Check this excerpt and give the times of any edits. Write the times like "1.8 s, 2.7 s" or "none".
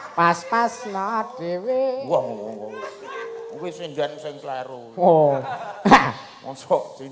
none